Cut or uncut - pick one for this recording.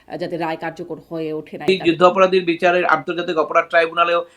cut